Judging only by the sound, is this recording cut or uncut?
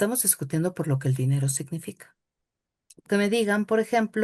cut